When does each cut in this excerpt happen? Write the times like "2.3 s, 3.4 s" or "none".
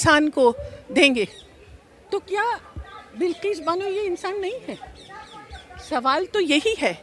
none